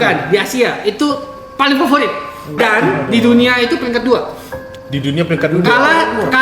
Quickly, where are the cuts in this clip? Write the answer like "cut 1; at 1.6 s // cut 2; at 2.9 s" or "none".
cut 1; at 2.5 s